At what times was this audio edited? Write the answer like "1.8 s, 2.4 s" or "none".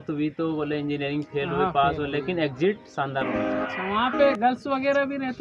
3.7 s